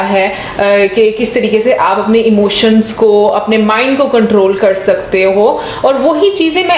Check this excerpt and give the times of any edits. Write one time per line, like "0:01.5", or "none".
none